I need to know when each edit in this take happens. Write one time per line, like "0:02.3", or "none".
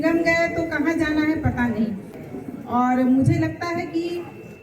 0:02.2